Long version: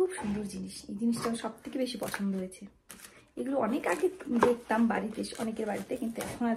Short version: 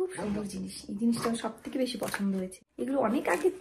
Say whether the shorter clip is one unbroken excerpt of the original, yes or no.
no